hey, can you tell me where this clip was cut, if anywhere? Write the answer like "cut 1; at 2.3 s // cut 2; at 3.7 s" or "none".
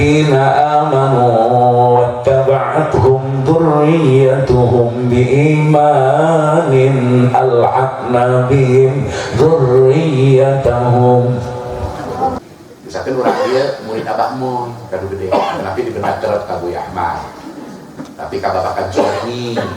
cut 1; at 12.4 s